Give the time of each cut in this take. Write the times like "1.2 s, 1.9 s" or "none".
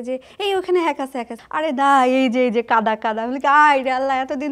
1.4 s

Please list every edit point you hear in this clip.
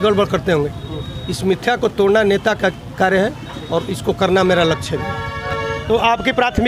none

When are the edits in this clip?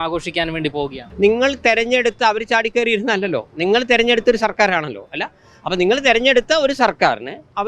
1.0 s

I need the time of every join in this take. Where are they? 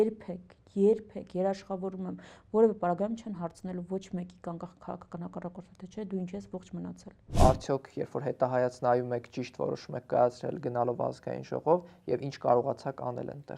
7.3 s

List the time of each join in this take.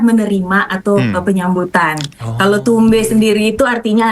none

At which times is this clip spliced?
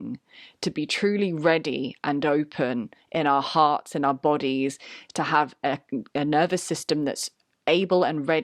none

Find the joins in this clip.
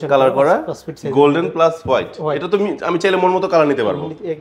none

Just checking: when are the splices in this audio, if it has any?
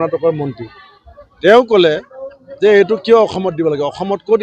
none

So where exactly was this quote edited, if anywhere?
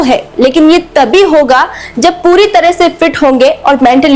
none

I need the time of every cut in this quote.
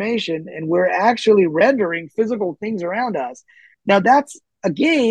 none

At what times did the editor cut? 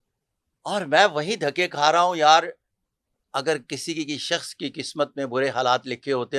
3.2 s

